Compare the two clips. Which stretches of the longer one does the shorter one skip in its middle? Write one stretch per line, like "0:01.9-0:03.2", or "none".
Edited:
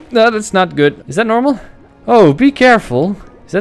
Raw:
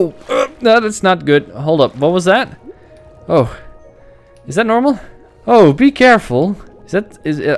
0:01.5-0:04.4